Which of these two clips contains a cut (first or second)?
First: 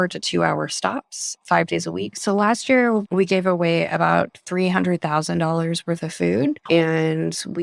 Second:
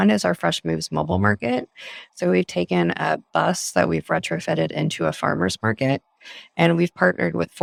first